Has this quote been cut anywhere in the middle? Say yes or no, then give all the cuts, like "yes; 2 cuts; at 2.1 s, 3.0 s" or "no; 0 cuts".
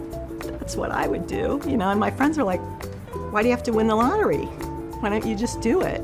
no; 0 cuts